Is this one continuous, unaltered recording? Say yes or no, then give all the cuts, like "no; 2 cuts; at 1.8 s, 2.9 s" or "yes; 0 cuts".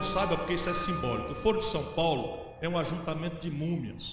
no; 1 cut; at 2.5 s